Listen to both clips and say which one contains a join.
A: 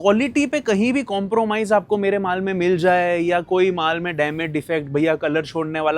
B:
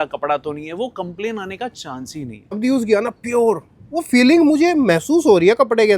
B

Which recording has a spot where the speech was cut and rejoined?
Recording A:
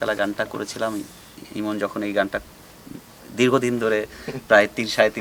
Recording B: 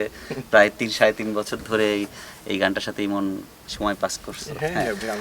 B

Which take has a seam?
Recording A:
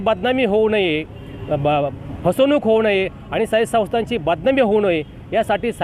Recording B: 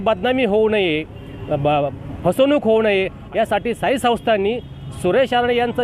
B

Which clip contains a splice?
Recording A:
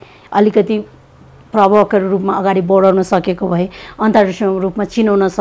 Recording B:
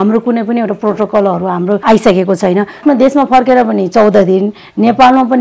B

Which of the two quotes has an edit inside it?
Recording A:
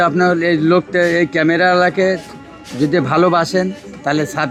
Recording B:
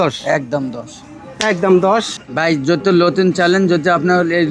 B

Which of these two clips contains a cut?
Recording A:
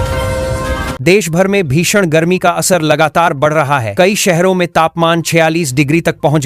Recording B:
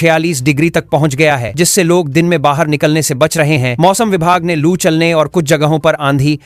A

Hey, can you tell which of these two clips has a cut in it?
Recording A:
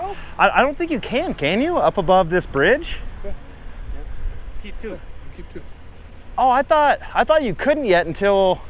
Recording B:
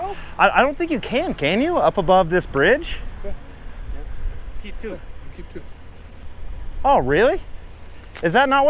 B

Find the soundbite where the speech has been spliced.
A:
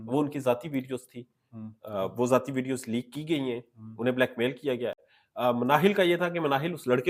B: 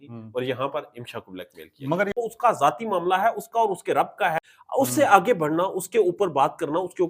B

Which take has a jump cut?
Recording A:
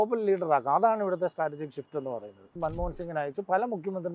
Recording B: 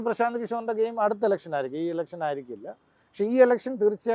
A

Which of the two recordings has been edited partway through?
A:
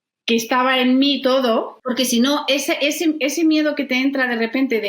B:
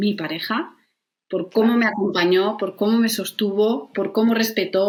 A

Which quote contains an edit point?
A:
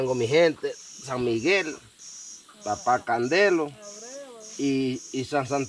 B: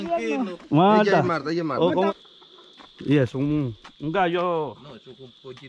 B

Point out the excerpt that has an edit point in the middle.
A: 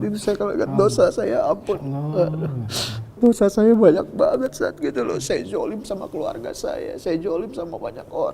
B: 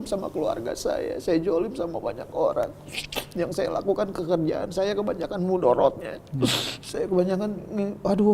A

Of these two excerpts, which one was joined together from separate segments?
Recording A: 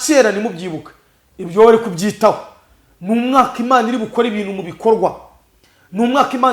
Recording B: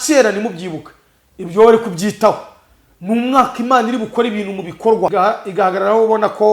B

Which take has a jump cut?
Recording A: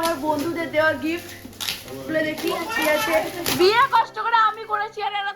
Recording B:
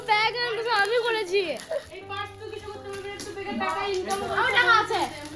A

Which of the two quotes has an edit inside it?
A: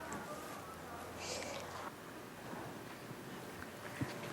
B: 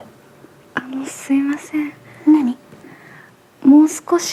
A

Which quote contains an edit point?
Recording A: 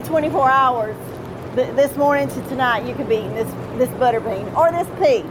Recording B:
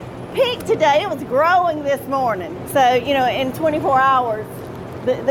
B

